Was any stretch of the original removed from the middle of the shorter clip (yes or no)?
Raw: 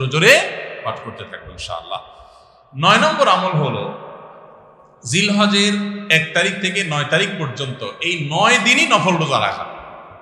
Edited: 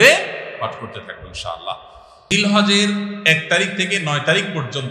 yes